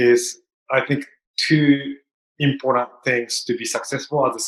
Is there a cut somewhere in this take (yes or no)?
no